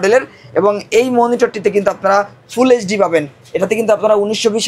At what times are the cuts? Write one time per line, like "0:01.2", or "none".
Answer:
none